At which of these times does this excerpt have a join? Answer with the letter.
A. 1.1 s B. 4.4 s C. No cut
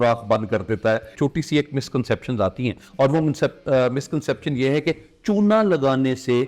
A